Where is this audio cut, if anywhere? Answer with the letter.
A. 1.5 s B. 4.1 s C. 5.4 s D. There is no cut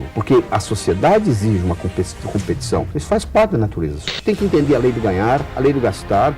B